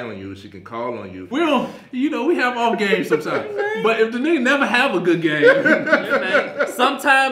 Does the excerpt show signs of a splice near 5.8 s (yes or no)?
no